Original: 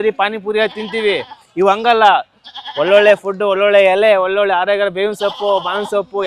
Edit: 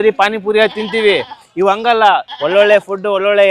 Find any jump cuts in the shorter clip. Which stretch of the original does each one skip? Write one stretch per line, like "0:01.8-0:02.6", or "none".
0:02.3-0:02.7